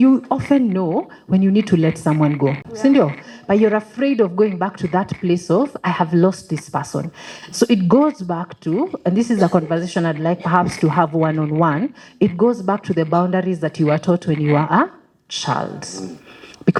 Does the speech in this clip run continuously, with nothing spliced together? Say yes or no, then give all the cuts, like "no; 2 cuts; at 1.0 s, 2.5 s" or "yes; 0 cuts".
yes; 0 cuts